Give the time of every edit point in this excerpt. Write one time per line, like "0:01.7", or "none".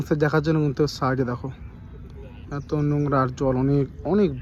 none

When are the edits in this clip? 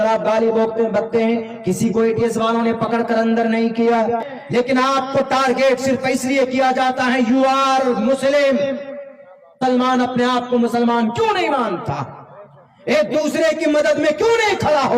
0:04.3

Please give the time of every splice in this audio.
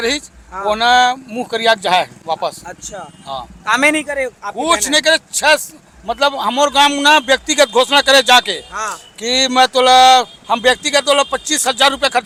none

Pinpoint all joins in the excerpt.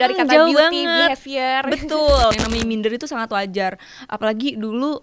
0:02.3

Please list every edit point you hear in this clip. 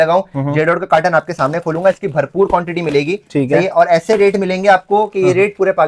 none

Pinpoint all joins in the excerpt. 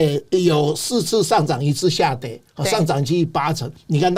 none

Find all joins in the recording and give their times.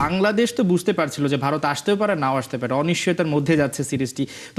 none

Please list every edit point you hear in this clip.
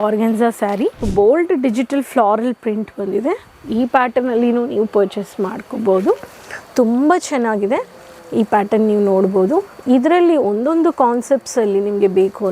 0:01.0

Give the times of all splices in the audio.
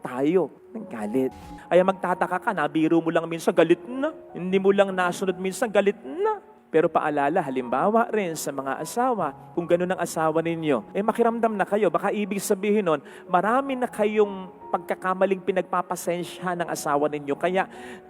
0:01.5

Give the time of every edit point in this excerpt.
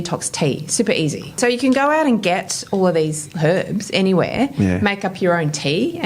0:01.4

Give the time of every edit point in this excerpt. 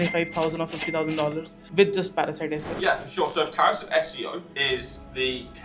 0:02.7
0:04.7

